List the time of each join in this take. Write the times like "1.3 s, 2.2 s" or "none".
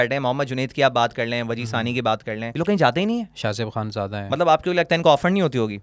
2.5 s